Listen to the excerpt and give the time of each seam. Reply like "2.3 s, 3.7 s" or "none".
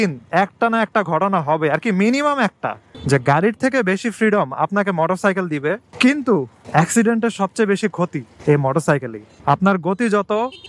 2.9 s, 9.3 s